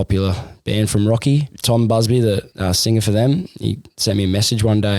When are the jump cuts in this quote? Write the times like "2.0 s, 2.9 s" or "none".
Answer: 1.5 s, 2.5 s